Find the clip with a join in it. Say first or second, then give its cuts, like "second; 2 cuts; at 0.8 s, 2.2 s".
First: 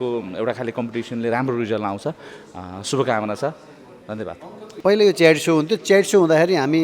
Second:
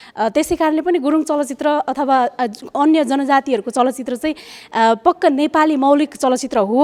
first; 1 cut; at 4.6 s